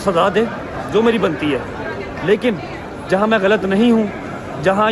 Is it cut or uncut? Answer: uncut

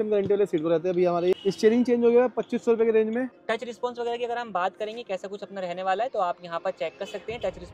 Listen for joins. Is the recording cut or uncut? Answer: cut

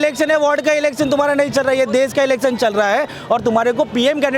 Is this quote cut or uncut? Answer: uncut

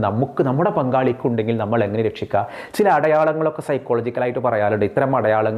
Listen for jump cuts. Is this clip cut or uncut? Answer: uncut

